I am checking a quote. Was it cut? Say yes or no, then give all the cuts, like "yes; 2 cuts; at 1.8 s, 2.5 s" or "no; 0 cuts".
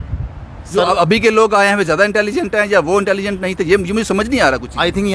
no; 0 cuts